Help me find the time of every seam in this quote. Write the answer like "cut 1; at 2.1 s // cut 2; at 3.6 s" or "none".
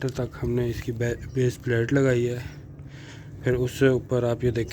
none